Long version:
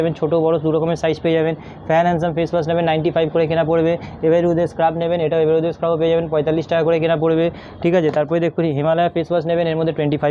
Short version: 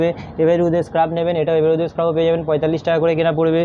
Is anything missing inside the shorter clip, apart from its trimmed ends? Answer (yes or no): no